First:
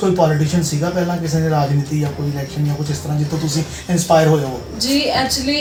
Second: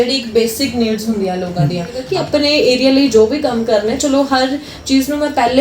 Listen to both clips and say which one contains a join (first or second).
second